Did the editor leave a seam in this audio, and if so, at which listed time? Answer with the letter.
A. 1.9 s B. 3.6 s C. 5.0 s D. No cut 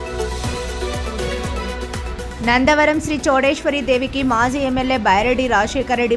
A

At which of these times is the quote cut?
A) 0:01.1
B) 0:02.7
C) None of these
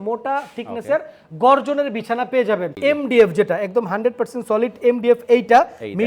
B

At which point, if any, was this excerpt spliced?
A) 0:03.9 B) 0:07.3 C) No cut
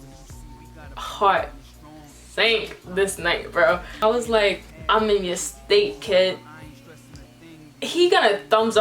A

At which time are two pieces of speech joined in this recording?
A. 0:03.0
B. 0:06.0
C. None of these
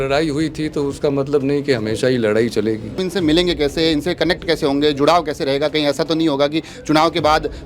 A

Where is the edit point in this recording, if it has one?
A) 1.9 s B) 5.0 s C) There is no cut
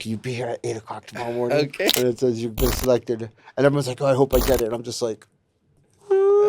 A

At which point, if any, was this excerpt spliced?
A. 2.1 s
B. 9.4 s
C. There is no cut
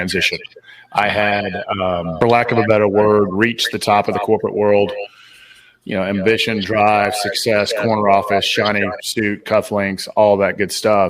A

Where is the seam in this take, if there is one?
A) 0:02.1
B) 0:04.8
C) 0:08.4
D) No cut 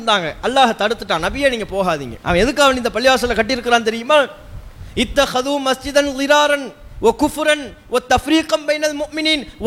A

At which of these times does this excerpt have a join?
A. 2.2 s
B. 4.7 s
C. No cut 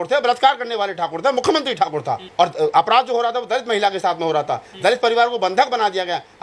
A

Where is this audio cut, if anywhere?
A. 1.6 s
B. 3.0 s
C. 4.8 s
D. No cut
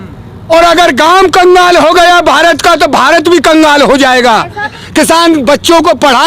C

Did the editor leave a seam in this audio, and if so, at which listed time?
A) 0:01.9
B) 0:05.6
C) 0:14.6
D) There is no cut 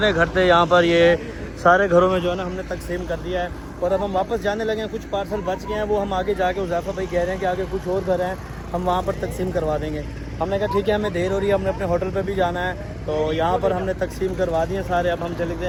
D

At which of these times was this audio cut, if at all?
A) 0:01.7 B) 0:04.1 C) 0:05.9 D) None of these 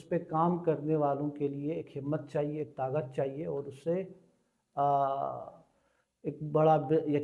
D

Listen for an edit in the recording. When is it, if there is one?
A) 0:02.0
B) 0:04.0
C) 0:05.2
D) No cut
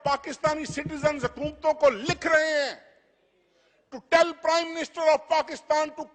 D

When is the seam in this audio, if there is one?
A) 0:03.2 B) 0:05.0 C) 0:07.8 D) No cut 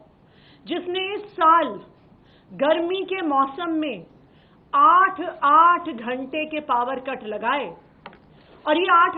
D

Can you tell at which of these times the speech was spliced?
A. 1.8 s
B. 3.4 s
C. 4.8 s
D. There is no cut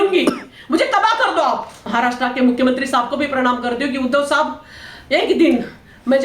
A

